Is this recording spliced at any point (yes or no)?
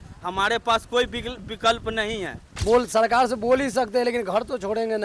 yes